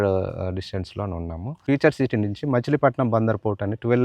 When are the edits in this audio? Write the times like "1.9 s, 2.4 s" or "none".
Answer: 1.6 s